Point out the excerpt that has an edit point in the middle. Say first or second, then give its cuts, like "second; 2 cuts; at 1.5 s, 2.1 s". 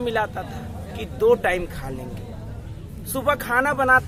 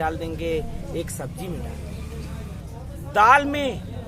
second; 1 cut; at 2.6 s